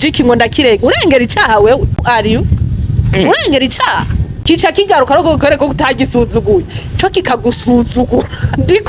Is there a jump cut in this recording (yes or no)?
yes